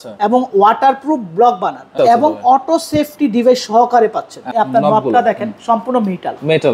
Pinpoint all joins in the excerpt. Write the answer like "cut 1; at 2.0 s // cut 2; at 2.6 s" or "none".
cut 1; at 2.0 s // cut 2; at 4.5 s